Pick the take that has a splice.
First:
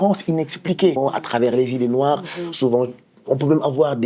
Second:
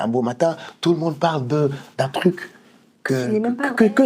first; 1 cut; at 1.0 s

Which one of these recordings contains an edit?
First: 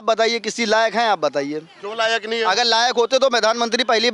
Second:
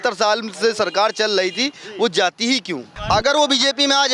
second; 1 cut; at 2.9 s

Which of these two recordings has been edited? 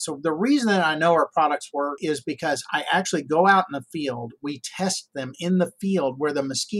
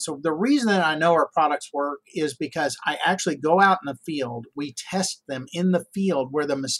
first; 1 cut; at 2.0 s

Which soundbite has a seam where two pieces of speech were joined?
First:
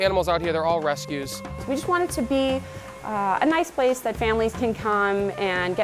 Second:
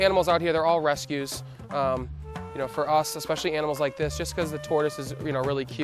first; 1 cut; at 1.6 s

